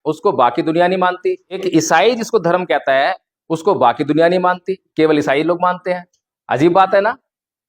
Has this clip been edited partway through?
yes; 1 cut; at 1.6 s

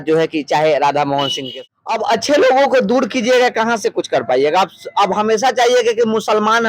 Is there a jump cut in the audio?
yes; 1 cut; at 1.4 s

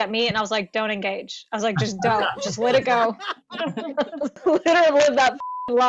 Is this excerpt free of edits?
no; 1 cut; at 4.4 s

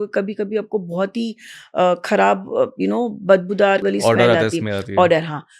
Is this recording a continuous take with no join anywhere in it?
no; 1 cut; at 3.8 s

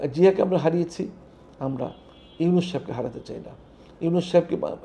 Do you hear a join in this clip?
no; 0 cuts

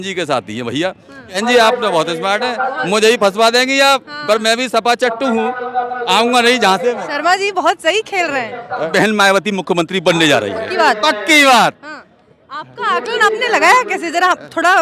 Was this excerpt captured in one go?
no; 2 cuts; at 1.4 s, 8.9 s

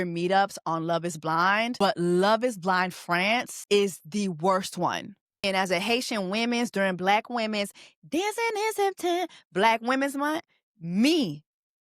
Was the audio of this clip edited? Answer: yes; 3 cuts; at 1.7 s, 3.6 s, 5.4 s

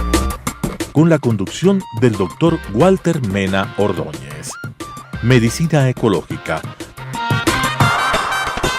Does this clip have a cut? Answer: no; 0 cuts

